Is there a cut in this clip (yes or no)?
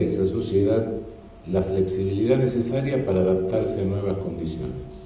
yes